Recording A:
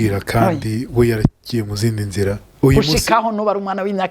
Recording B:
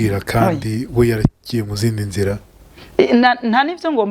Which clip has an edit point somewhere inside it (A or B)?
A